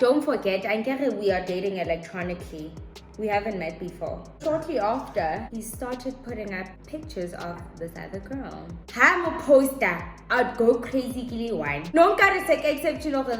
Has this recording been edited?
yes; 3 cuts; at 4.4 s, 8.9 s, 11.9 s

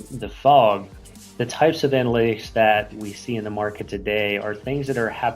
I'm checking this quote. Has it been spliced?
yes; 1 cut; at 2.9 s

